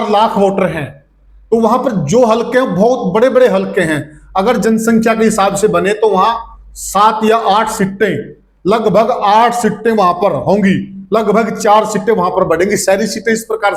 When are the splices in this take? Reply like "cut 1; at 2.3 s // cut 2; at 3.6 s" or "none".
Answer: none